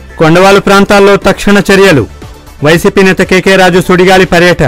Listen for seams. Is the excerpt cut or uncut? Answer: uncut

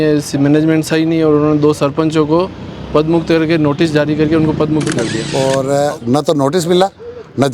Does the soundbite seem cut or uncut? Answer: cut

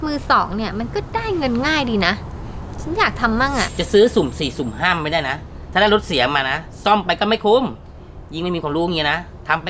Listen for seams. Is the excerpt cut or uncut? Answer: cut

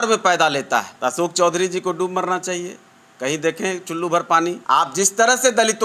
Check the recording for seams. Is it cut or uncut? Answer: cut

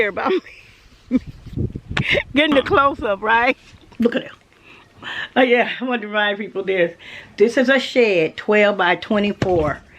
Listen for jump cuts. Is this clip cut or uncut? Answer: cut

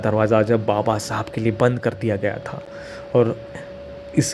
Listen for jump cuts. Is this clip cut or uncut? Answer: uncut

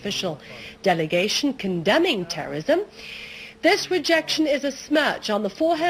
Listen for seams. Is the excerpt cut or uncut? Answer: uncut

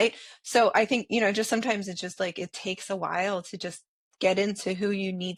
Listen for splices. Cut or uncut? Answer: uncut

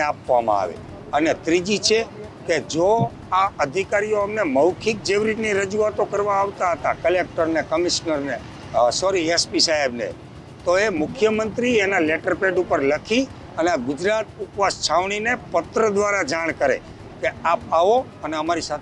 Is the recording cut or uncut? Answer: uncut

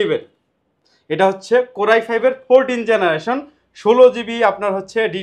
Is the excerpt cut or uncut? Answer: uncut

